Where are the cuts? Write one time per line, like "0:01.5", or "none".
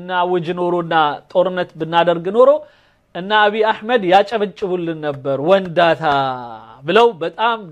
none